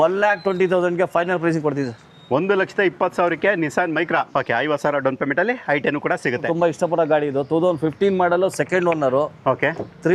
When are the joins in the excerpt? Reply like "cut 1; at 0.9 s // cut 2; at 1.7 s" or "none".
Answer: cut 1; at 4.1 s // cut 2; at 6.4 s